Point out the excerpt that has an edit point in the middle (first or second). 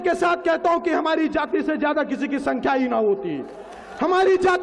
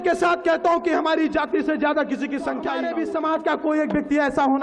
second